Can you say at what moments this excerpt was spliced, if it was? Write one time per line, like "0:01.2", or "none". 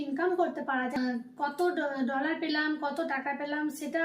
0:01.0